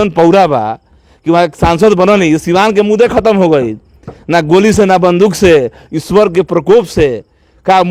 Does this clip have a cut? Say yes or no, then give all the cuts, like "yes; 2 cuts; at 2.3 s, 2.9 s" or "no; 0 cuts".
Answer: no; 0 cuts